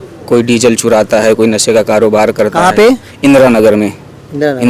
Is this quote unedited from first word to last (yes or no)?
yes